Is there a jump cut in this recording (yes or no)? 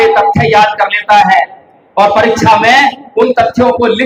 no